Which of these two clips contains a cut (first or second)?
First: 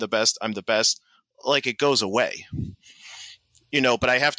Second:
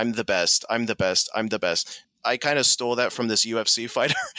second